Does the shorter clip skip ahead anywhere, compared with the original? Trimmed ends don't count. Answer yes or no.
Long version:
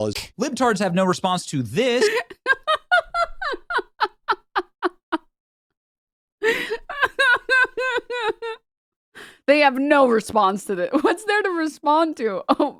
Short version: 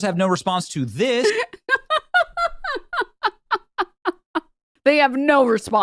yes